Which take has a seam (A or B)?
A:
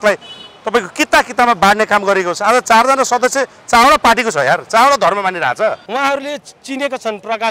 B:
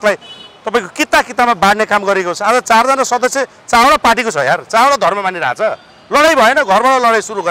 A